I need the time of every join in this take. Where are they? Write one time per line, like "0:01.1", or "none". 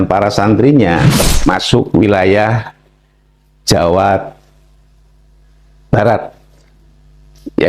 0:01.0